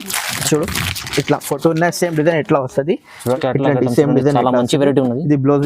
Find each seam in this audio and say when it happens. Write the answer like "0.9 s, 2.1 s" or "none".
3.4 s